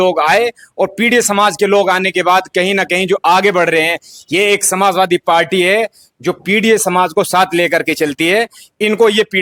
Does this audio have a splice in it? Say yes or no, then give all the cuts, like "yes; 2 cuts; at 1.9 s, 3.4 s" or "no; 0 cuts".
no; 0 cuts